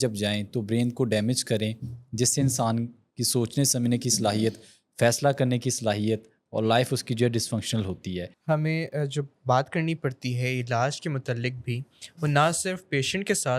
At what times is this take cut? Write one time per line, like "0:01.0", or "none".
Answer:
0:08.3